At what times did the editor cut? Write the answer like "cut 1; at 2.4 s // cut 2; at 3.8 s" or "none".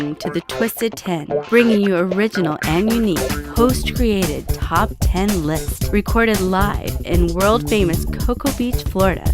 cut 1; at 5.7 s